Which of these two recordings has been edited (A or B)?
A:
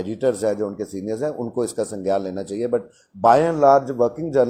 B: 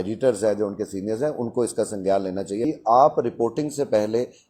B